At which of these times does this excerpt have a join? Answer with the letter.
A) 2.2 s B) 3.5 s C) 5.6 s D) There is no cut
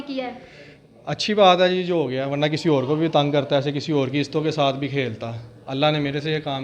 D